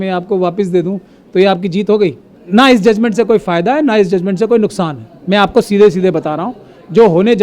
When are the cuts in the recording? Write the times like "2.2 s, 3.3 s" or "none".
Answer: 2.3 s